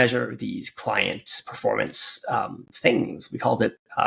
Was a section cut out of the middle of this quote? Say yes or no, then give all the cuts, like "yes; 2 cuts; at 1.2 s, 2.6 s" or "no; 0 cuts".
no; 0 cuts